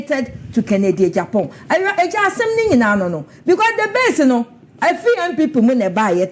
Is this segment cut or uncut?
uncut